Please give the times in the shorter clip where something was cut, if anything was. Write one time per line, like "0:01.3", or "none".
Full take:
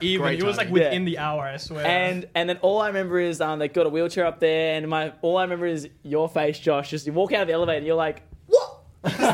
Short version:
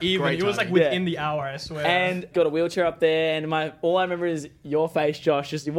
0:02.3